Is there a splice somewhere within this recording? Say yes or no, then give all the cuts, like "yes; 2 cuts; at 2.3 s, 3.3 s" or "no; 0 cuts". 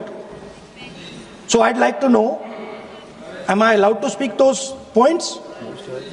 no; 0 cuts